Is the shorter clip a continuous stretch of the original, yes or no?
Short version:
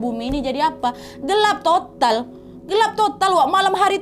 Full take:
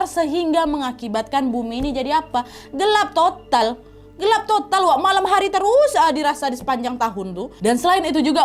yes